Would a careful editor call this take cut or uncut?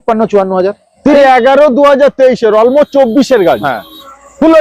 cut